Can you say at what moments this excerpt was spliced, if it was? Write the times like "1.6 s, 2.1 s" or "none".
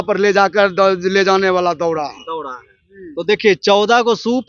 none